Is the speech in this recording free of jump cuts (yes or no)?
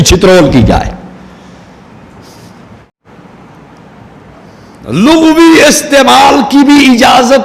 no